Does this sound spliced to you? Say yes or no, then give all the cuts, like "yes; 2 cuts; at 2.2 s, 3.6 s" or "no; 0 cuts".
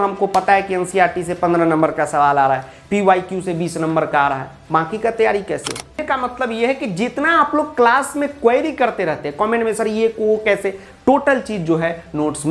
yes; 1 cut; at 6.0 s